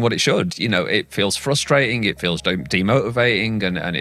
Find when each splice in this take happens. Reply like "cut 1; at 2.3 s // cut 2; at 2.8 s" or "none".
none